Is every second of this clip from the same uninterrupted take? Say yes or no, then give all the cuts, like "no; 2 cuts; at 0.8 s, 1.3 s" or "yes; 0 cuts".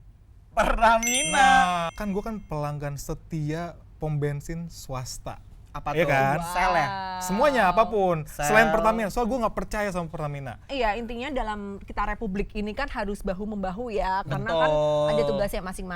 no; 2 cuts; at 1.9 s, 10.6 s